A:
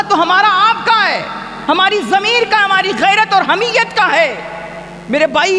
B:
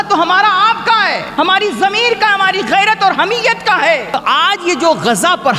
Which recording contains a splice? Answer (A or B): B